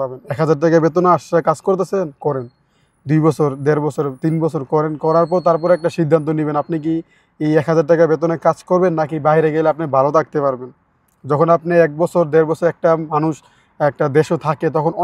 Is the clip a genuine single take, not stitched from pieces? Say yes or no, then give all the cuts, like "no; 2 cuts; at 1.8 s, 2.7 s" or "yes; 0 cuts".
yes; 0 cuts